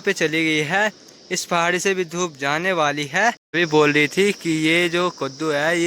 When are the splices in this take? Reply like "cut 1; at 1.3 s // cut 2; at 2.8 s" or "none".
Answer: cut 1; at 3.5 s